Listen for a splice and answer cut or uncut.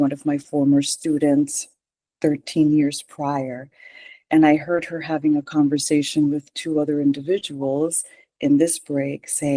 uncut